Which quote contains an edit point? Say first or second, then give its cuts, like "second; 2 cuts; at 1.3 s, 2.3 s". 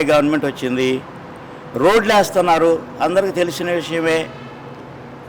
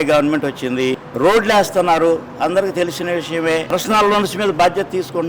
second; 2 cuts; at 1.1 s, 3.7 s